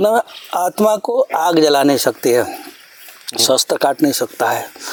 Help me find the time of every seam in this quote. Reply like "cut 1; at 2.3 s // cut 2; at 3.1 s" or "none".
none